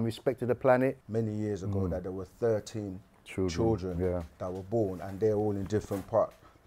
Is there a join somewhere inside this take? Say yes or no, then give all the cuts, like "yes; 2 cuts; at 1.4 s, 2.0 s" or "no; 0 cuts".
yes; 1 cut; at 1.0 s